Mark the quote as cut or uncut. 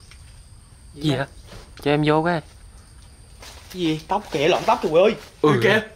uncut